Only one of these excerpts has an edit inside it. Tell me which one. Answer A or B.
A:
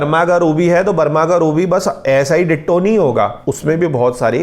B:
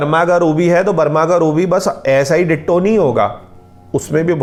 A